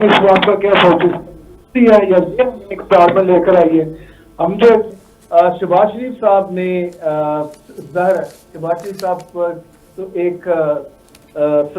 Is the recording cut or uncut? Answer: cut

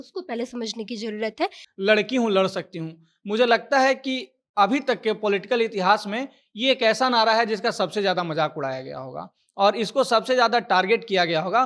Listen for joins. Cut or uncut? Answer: cut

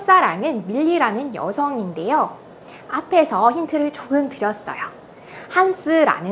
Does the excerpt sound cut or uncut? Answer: uncut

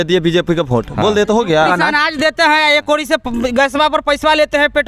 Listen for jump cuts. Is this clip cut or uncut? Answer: cut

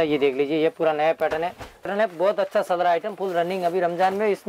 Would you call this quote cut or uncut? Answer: cut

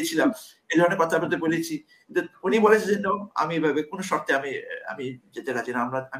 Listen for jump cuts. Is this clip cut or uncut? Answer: uncut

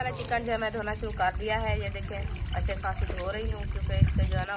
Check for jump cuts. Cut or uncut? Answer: uncut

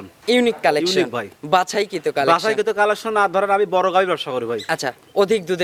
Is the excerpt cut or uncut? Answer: uncut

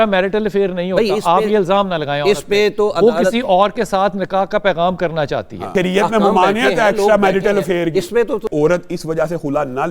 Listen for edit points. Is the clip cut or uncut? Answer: cut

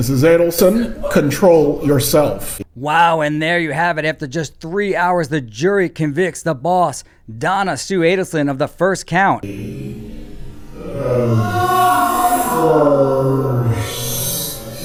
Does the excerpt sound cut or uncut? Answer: uncut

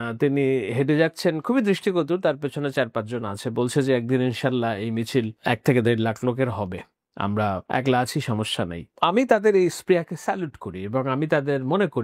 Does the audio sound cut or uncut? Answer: uncut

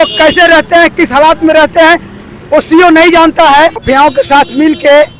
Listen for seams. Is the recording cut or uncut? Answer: cut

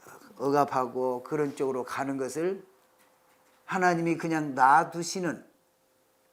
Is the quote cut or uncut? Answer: uncut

